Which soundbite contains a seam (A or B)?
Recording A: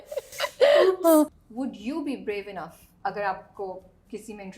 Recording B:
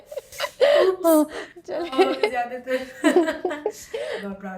A